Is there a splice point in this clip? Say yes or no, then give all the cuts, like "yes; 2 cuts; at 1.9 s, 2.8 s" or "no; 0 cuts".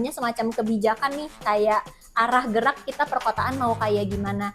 no; 0 cuts